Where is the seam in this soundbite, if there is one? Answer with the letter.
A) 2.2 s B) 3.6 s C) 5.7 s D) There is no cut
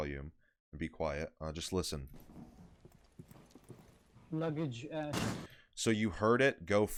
D